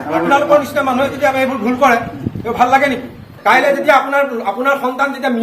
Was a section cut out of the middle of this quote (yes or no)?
yes